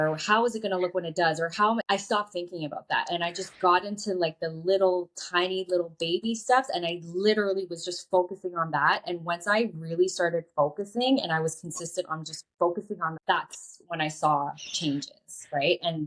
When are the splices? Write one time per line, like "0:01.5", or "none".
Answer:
none